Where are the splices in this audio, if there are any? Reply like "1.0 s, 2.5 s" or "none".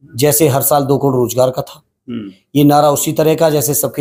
none